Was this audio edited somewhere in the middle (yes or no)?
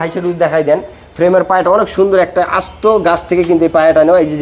no